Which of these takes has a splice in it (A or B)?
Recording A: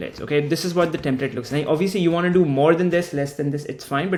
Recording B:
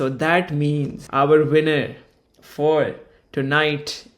B